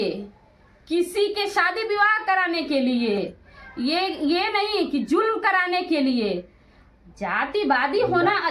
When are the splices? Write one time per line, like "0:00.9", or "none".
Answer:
none